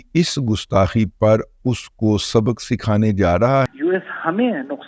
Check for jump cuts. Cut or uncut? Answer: cut